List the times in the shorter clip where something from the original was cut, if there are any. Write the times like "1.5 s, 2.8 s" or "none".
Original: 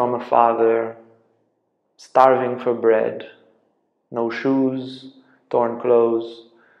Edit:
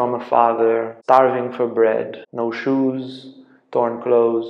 0.9 s, 2.2 s